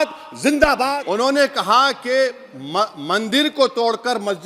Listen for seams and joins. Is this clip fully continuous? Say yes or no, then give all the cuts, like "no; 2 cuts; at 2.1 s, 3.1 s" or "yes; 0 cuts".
no; 1 cut; at 0.9 s